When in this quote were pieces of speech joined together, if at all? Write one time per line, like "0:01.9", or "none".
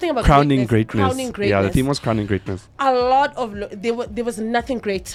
none